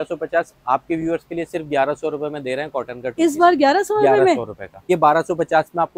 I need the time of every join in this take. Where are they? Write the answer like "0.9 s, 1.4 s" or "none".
4.9 s